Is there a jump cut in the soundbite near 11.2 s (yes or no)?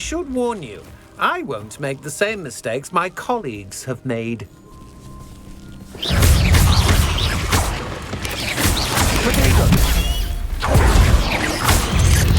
yes